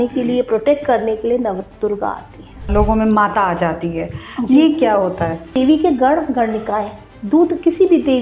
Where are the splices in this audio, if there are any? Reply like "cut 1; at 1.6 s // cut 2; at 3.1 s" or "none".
cut 1; at 2.7 s // cut 2; at 5.6 s